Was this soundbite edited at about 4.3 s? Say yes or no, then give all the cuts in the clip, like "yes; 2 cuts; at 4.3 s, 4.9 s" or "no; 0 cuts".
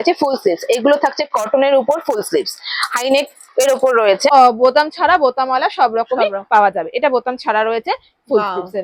yes; 1 cut; at 4.3 s